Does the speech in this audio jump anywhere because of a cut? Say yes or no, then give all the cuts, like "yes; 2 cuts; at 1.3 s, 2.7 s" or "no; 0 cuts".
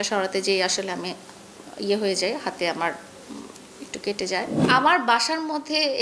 yes; 1 cut; at 4.6 s